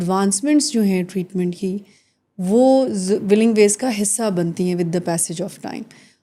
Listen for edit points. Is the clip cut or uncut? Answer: uncut